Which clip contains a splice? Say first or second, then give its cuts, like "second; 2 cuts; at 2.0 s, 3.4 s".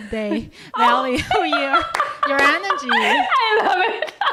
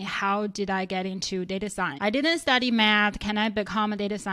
second; 1 cut; at 1.9 s